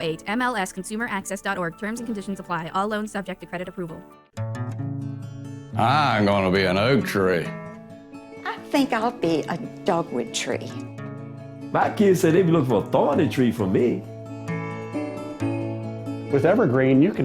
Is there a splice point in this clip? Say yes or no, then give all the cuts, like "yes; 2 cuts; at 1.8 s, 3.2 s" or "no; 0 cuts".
yes; 1 cut; at 4.3 s